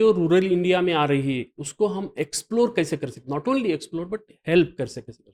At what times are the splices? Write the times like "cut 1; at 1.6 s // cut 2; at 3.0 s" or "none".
none